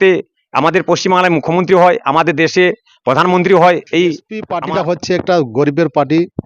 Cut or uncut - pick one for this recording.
cut